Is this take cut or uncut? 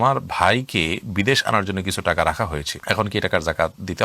uncut